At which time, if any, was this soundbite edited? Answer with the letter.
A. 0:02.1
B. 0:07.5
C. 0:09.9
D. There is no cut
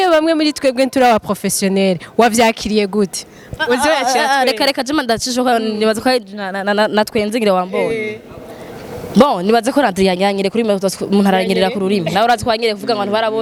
D